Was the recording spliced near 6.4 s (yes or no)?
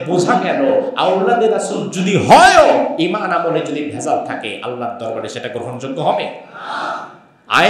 no